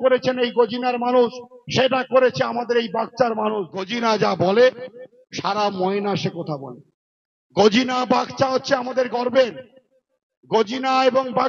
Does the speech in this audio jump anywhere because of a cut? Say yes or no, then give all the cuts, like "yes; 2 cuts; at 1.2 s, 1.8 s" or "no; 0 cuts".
yes; 1 cut; at 3.9 s